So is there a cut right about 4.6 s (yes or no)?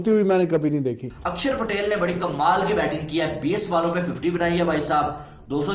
no